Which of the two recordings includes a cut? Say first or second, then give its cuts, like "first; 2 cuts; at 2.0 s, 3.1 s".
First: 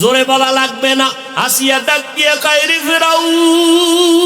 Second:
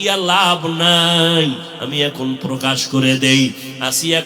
first; 1 cut; at 1.2 s